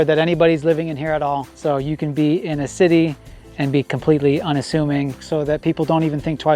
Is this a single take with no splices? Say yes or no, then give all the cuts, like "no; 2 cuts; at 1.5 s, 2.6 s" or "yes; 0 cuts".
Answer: no; 2 cuts; at 1.5 s, 5.2 s